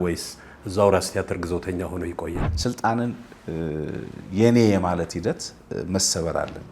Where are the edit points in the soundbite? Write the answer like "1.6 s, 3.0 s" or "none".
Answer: 2.5 s